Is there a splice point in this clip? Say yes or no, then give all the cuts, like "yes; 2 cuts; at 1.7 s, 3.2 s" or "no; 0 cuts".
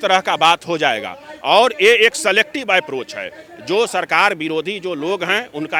no; 0 cuts